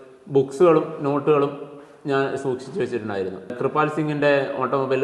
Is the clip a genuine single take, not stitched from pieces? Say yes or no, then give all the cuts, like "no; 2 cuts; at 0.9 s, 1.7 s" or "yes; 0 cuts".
no; 1 cut; at 3.6 s